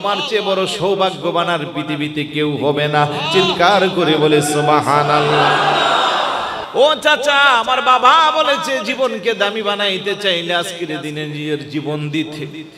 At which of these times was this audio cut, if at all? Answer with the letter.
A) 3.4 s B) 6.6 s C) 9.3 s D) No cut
B